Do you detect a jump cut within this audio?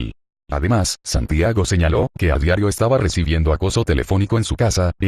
yes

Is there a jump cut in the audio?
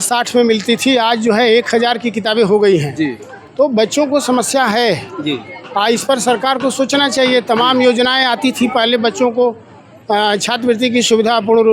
no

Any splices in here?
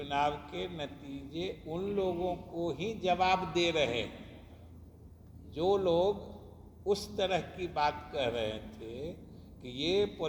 no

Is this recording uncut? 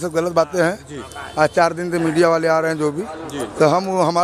yes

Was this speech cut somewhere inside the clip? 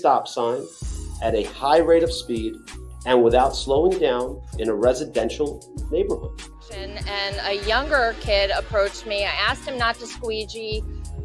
yes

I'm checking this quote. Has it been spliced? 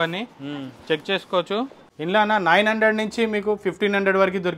yes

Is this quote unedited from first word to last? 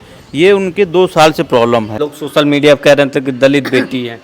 no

